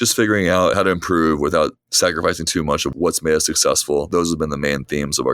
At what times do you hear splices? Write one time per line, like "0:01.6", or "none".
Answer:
0:00.7
0:01.8
0:02.9
0:04.1